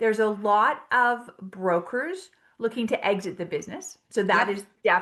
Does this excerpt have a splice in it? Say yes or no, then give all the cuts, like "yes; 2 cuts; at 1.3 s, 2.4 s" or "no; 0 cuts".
no; 0 cuts